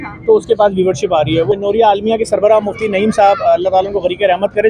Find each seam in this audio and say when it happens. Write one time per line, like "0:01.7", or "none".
0:01.5